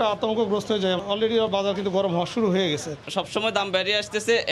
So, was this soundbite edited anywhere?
yes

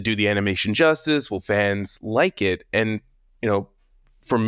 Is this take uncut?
yes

